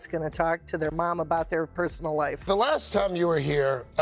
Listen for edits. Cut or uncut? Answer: cut